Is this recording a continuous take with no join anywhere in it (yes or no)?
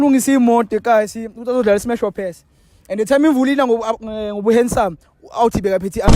yes